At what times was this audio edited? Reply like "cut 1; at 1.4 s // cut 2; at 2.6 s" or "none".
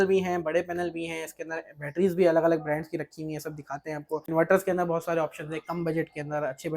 cut 1; at 4.3 s

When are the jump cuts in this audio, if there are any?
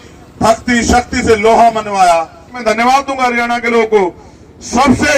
cut 1; at 2.6 s

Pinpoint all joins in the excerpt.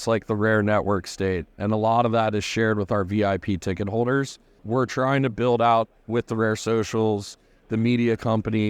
cut 1; at 4.5 s

